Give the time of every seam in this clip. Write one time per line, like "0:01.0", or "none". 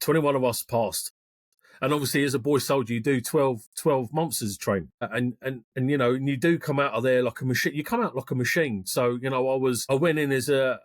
0:05.1
0:09.8